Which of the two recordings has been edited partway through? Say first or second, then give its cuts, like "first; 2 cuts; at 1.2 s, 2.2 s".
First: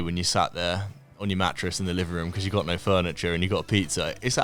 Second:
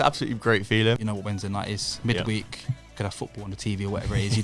second; 1 cut; at 1.0 s